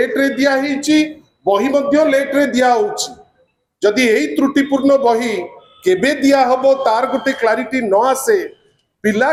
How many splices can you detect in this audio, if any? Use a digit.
0